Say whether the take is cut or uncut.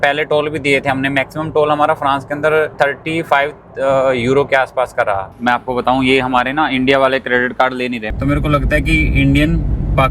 cut